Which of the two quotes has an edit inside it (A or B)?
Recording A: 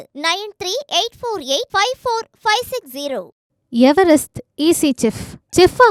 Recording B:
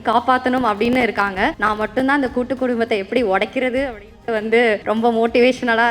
B